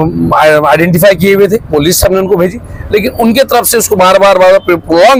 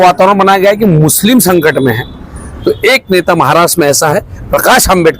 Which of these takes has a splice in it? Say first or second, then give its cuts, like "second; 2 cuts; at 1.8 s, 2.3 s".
second; 1 cut; at 2.5 s